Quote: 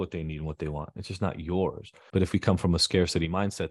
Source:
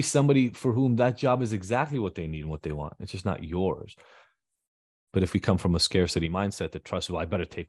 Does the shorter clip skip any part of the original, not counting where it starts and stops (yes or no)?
yes